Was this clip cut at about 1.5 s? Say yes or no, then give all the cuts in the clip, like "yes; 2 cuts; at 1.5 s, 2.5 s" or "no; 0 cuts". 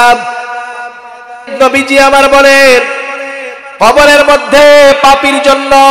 yes; 1 cut; at 1.5 s